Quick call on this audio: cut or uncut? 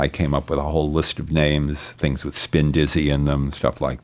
uncut